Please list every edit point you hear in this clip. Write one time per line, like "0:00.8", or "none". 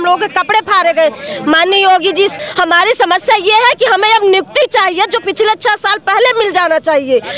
0:02.4